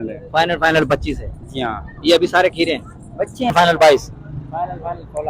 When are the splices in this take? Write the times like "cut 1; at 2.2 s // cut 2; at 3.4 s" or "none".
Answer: cut 1; at 3.5 s